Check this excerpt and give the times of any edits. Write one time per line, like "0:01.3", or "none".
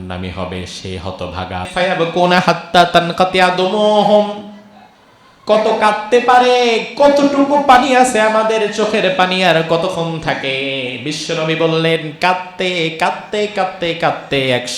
0:01.7